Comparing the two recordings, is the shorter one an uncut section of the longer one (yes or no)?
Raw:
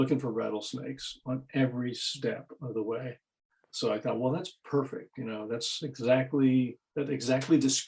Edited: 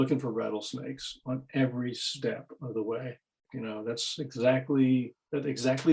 no